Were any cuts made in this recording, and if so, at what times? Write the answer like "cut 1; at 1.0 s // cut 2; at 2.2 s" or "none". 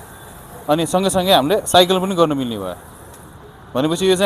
none